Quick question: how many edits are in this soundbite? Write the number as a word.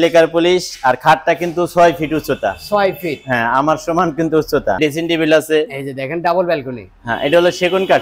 one